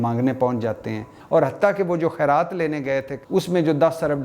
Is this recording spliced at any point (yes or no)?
yes